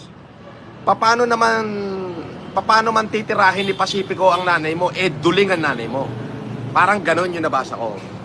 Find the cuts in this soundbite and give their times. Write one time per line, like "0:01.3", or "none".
0:03.6